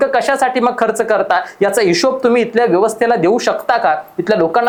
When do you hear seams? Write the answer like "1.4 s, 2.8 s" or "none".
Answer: none